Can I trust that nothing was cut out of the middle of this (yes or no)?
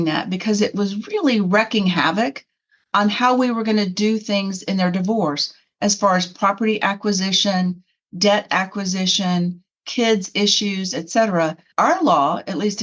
no